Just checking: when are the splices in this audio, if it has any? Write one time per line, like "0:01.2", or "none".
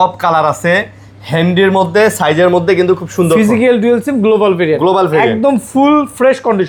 none